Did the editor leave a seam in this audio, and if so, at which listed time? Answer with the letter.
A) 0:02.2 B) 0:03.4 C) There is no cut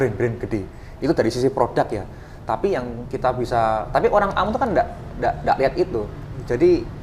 C